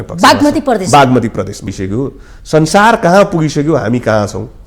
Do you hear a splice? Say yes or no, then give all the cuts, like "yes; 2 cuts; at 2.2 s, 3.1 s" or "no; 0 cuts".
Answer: yes; 1 cut; at 1.7 s